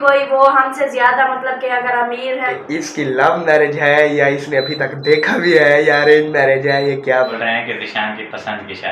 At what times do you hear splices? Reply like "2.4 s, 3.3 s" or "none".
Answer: 2.6 s, 7.3 s